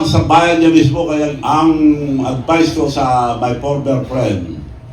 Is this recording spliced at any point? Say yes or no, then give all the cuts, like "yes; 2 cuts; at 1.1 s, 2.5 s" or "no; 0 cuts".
yes; 1 cut; at 1.4 s